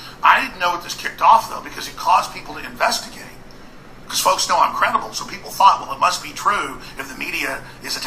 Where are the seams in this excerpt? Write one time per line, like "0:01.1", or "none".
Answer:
0:04.9